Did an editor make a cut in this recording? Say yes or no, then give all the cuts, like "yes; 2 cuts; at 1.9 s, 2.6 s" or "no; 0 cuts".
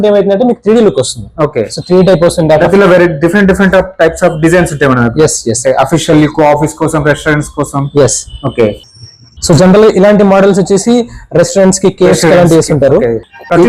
no; 0 cuts